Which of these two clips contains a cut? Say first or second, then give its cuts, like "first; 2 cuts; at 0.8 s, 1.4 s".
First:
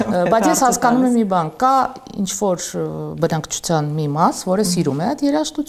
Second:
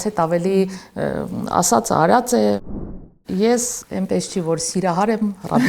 second; 2 cuts; at 3.1 s, 3.8 s